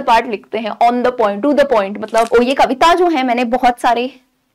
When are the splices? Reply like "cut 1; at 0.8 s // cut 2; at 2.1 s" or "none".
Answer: cut 1; at 2.3 s